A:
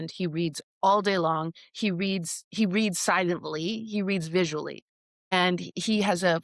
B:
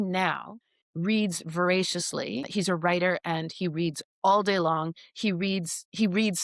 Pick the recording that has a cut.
B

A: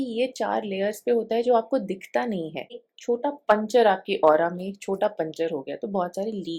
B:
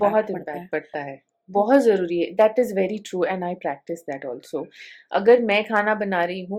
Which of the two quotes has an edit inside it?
A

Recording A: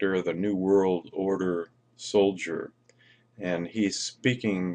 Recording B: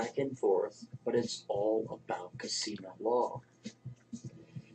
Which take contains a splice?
A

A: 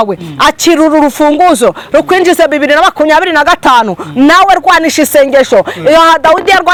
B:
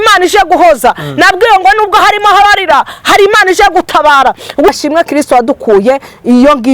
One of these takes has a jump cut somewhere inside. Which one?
B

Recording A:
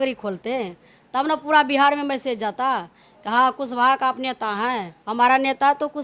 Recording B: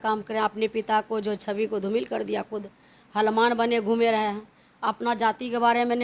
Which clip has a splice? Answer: A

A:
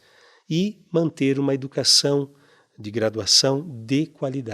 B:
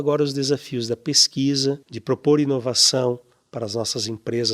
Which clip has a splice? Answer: B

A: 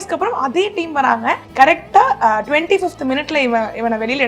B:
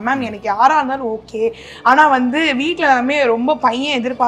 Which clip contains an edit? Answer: A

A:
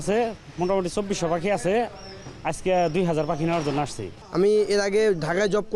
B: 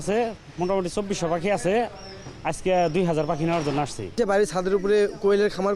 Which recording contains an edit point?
B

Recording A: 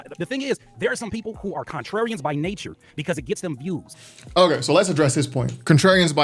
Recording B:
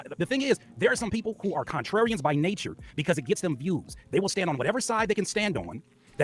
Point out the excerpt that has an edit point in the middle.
B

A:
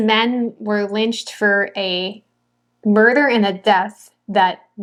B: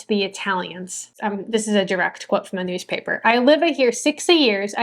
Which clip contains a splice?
B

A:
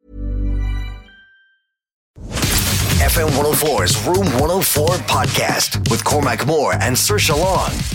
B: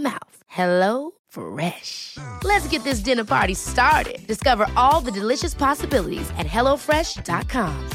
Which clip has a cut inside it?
A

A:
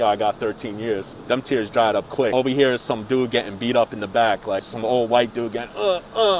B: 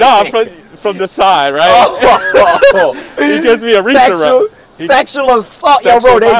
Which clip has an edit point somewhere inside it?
A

